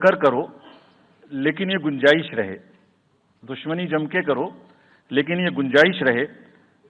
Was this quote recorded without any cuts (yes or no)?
yes